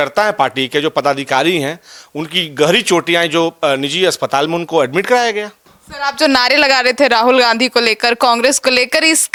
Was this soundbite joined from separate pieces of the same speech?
no; 0 cuts

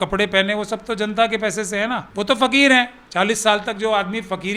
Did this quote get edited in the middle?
yes; 1 cut; at 2.1 s

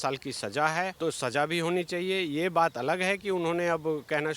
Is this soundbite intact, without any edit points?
no; 1 cut; at 0.9 s

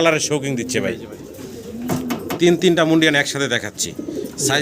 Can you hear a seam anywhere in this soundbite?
yes; 1 cut; at 2.4 s

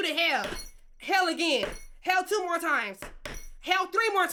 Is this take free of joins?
yes; 0 cuts

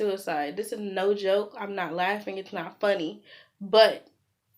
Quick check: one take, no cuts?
yes; 0 cuts

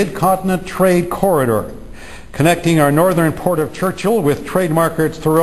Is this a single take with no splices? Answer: no; 1 cut; at 1.8 s

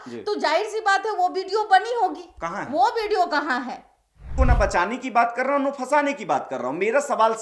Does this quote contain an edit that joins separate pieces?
yes; 1 cut; at 4.2 s

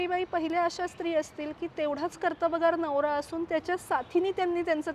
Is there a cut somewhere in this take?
no; 0 cuts

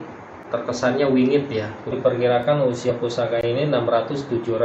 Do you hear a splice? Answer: yes; 1 cut; at 1.9 s

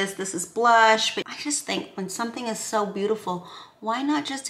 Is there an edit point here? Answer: yes; 1 cut; at 1.3 s

